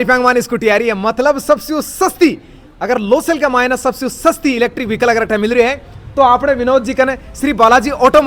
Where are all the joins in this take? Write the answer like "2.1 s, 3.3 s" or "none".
none